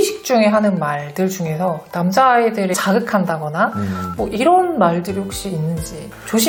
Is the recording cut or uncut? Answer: uncut